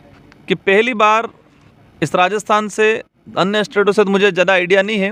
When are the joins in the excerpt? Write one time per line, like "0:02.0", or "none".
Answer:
none